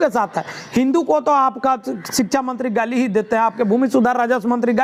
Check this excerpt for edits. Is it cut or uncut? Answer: uncut